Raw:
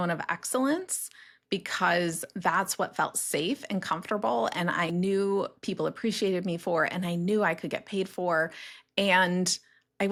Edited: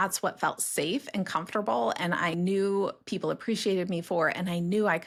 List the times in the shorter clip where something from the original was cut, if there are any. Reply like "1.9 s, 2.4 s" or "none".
none